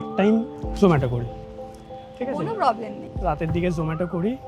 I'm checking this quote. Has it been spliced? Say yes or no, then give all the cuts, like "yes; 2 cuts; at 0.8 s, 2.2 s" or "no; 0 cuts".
no; 0 cuts